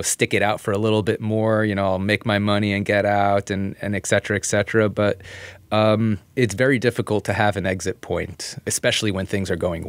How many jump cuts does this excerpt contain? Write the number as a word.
two